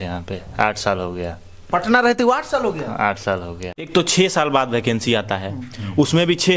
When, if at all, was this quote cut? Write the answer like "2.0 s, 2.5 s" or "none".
3.9 s

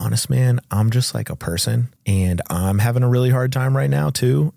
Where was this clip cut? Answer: 1.9 s

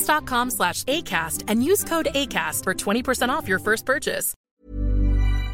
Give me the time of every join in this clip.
4.3 s

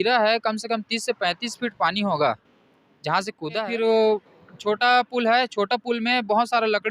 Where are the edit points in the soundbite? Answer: 3.6 s

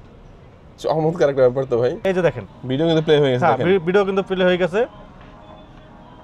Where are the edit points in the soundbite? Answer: 2.1 s

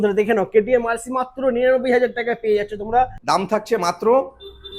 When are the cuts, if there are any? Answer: 3.2 s

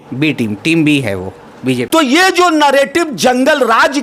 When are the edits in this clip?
1.9 s

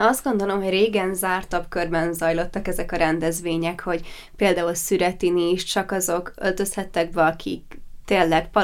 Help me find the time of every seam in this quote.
1.5 s

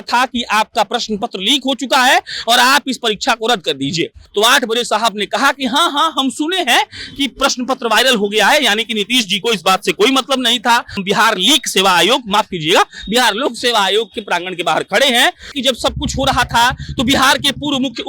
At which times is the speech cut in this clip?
4.2 s, 11.0 s, 15.5 s

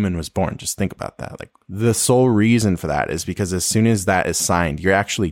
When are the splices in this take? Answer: none

